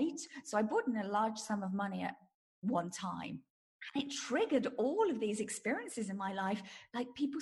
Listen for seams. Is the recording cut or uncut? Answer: cut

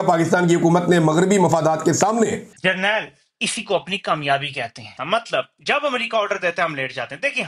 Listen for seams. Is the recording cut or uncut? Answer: uncut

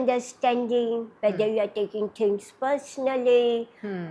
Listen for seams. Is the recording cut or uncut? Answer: cut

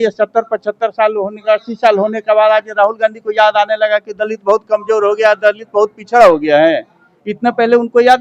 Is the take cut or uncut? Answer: uncut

